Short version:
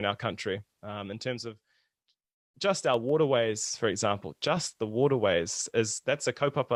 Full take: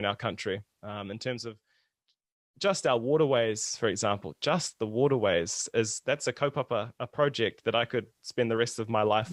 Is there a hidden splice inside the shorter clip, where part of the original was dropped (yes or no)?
no